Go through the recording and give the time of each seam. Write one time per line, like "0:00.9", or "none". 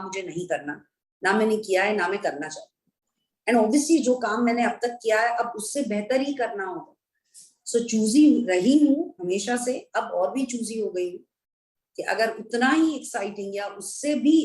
none